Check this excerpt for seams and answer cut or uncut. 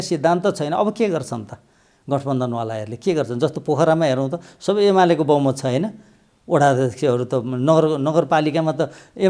uncut